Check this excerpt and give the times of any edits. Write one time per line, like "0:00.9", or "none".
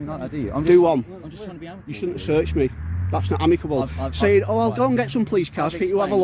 none